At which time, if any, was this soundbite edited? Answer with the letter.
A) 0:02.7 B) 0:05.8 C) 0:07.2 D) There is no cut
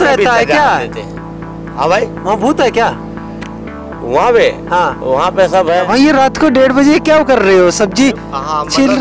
B